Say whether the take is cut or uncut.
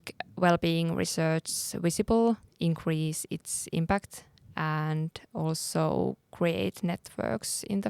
cut